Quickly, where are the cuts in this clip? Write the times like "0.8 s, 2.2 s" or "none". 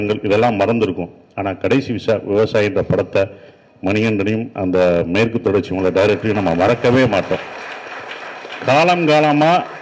none